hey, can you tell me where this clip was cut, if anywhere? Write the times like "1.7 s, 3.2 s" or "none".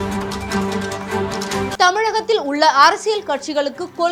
none